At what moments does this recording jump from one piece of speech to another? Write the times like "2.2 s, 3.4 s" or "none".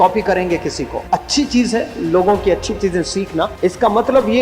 0.9 s, 3.5 s

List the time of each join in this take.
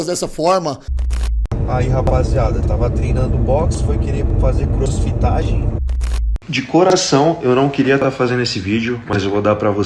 1.3 s, 6.3 s

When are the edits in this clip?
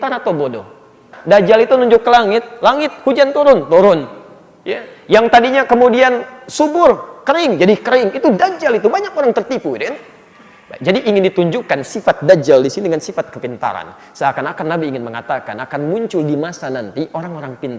1.1 s

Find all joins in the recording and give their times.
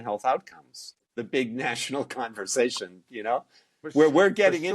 1.2 s

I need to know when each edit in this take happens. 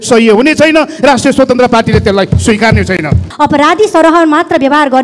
3.3 s

